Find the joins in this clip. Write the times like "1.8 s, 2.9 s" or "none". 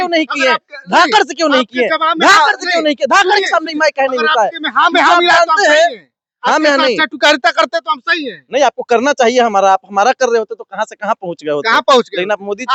none